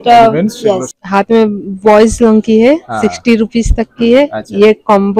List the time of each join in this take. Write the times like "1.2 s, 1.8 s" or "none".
0.9 s